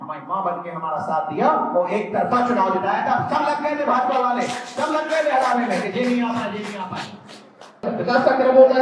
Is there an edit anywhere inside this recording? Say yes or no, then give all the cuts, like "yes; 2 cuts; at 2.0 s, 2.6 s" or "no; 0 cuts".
yes; 1 cut; at 7.9 s